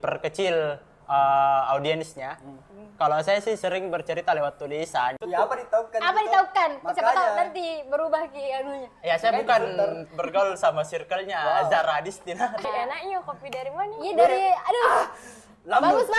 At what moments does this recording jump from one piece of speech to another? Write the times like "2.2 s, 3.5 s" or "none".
5.2 s, 12.6 s